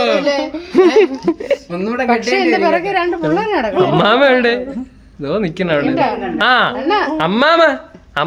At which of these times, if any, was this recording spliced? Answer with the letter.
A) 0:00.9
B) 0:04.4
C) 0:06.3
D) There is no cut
D